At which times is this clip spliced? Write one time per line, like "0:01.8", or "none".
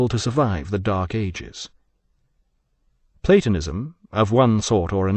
0:01.1